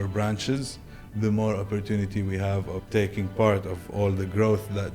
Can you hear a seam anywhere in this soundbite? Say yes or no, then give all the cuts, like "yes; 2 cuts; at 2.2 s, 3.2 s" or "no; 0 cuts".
yes; 1 cut; at 2.8 s